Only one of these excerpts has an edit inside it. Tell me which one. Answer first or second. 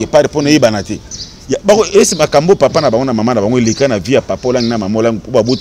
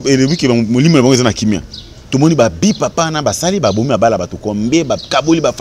first